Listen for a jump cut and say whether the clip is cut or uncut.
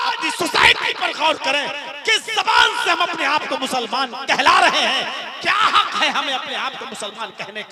uncut